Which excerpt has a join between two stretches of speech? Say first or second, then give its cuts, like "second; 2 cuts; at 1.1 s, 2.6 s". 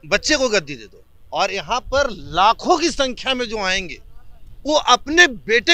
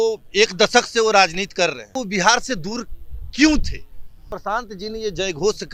second; 2 cuts; at 1.8 s, 4.3 s